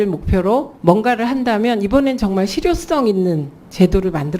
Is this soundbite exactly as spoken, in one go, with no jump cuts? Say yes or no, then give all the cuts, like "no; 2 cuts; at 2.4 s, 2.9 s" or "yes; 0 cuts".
yes; 0 cuts